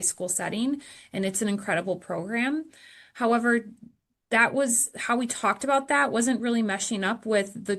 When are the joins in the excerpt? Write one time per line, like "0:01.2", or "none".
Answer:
none